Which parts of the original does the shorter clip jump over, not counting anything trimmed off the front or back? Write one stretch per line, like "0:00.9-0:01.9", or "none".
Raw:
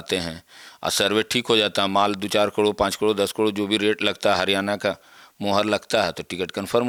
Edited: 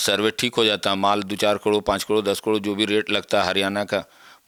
none